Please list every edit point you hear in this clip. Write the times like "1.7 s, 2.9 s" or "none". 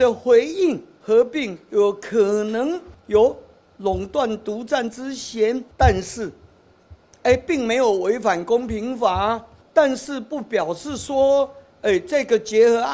0.9 s, 2.9 s, 5.7 s, 9.6 s